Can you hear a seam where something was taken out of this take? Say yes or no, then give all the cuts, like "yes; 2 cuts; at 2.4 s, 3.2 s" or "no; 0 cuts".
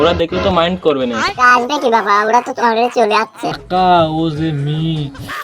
yes; 1 cut; at 3.6 s